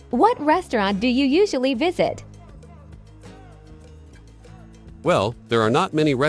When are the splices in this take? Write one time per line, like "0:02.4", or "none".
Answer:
0:02.2
0:05.0